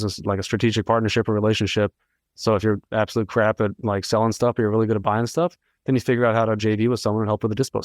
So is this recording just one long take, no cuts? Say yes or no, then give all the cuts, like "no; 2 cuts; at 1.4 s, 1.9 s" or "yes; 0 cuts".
yes; 0 cuts